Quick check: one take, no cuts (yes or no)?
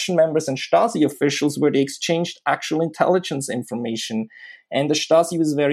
yes